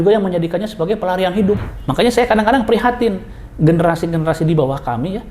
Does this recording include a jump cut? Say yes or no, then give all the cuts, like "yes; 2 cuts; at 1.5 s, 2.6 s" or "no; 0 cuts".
yes; 1 cut; at 1.8 s